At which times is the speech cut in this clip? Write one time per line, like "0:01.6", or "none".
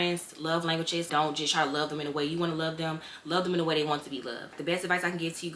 0:01.1
0:04.5